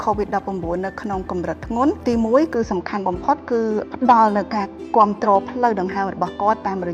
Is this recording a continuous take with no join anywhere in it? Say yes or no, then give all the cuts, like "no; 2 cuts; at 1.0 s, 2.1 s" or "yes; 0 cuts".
no; 2 cuts; at 2.0 s, 3.8 s